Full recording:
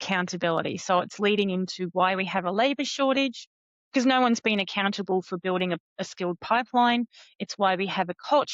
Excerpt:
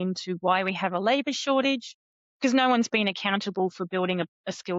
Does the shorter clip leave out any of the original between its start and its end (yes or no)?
no